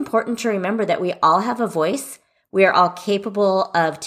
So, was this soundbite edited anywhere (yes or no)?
no